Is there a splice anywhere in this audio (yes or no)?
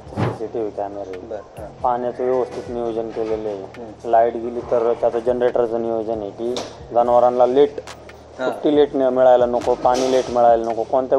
no